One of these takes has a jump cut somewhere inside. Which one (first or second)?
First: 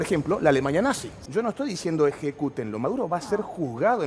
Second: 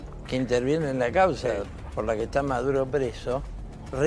first